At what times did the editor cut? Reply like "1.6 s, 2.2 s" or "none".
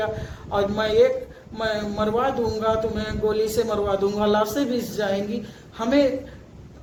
none